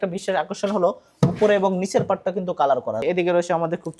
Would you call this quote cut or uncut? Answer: cut